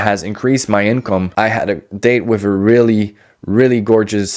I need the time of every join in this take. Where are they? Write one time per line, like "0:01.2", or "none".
0:01.3